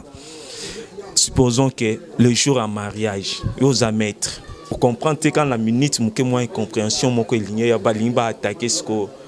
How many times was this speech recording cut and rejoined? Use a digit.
1